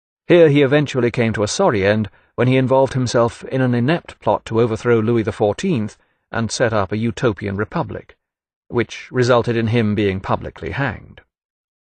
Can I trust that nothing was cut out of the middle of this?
yes; 0 cuts

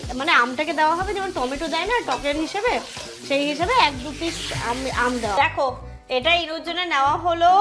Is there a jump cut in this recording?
yes; 1 cut; at 5.4 s

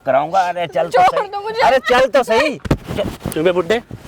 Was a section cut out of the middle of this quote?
no; 0 cuts

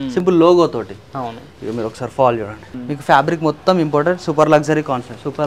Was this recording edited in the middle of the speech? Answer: yes; 1 cut; at 2.7 s

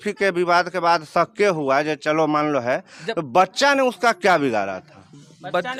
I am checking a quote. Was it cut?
no; 0 cuts

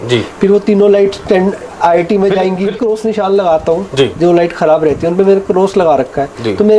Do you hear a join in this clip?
yes; 1 cut; at 2.8 s

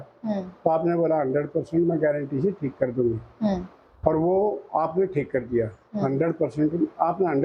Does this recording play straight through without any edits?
yes; 0 cuts

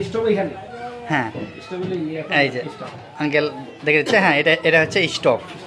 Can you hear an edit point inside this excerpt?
no; 0 cuts

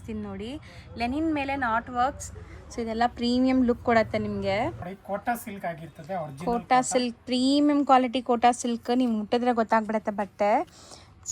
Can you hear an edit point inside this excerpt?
yes; 1 cut; at 4.9 s

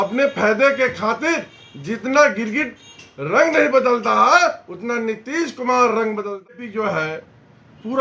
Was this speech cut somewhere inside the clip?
yes; 1 cut; at 6.5 s

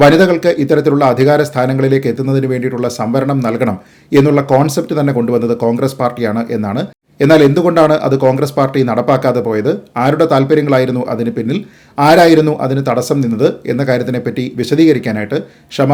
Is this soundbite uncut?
yes; 0 cuts

